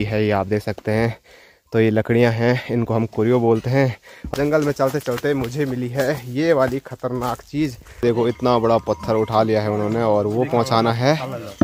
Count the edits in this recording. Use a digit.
2